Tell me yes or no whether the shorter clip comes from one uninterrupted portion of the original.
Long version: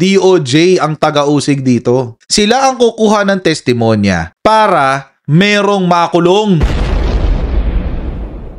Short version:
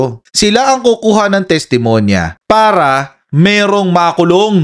yes